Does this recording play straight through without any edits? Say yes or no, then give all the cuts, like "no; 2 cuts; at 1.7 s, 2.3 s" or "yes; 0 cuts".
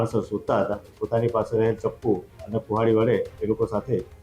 no; 1 cut; at 1.0 s